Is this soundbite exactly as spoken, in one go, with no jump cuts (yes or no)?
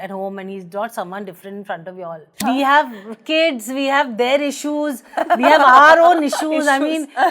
no